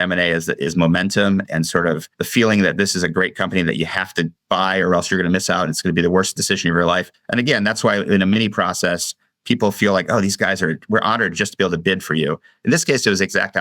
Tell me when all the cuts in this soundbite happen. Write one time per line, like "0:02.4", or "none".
0:01.9
0:07.1